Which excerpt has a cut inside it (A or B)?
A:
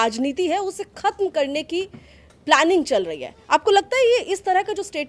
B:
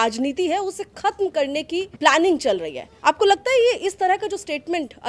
B